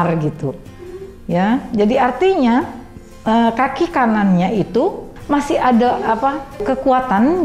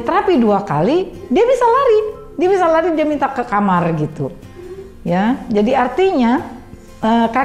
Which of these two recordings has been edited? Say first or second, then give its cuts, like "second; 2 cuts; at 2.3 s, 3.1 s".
first; 2 cuts; at 5.1 s, 6.6 s